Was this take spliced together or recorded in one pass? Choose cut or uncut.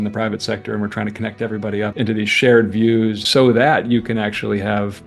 cut